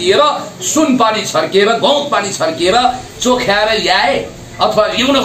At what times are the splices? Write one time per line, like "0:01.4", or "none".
none